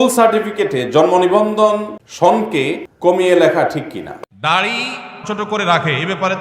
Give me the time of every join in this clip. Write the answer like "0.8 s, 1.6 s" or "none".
2.0 s, 2.9 s, 4.2 s